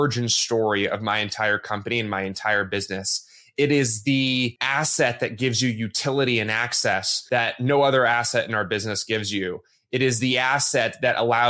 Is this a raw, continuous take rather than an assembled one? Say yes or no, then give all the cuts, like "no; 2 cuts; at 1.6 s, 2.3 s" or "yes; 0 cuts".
no; 2 cuts; at 4.6 s, 7.1 s